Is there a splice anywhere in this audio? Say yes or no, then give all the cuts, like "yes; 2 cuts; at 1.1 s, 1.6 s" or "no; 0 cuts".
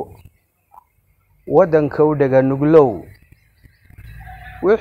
no; 0 cuts